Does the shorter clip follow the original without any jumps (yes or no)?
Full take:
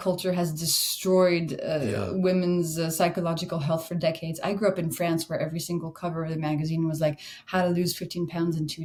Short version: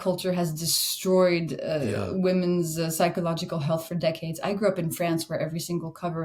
yes